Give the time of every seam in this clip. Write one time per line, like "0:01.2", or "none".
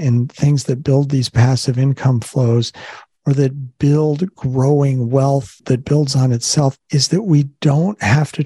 none

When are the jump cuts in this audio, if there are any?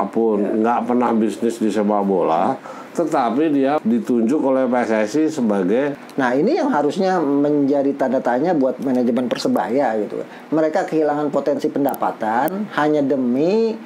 0:03.8
0:06.0

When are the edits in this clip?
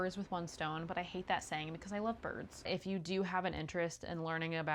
0:02.7

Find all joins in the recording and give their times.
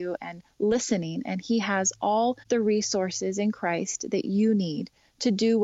0:02.4

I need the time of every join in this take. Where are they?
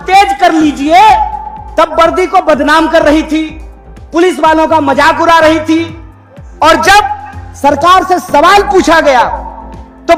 none

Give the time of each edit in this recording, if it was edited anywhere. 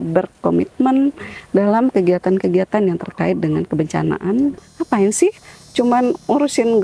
0:04.6

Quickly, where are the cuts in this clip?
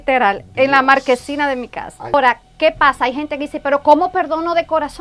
0:02.1

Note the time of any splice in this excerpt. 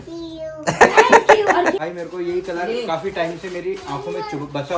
0:01.8

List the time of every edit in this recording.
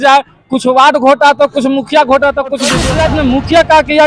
0:02.8

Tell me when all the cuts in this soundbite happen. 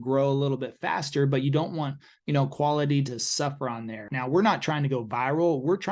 0:04.1

